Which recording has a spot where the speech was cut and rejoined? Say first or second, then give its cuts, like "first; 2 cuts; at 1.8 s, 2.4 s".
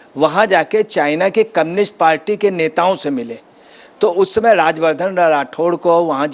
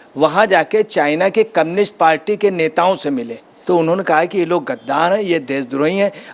second; 1 cut; at 3.5 s